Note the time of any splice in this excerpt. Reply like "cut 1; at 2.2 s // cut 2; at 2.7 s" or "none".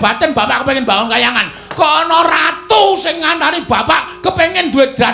none